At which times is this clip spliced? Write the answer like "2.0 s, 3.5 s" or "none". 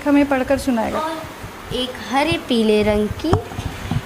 1.0 s